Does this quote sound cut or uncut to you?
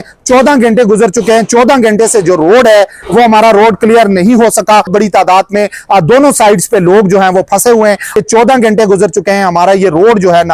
cut